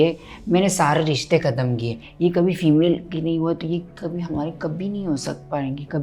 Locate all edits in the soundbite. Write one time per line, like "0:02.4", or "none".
0:02.0